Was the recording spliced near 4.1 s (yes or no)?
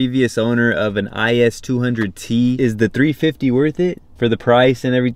yes